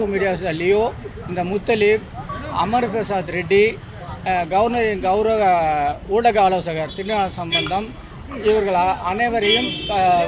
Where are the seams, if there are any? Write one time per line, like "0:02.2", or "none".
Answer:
none